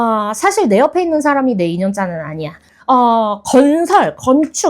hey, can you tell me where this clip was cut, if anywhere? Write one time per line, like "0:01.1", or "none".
0:02.7